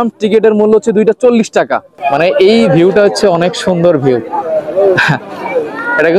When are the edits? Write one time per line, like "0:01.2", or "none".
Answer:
0:01.9